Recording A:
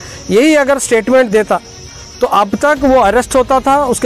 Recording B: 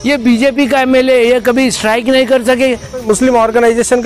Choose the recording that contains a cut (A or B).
B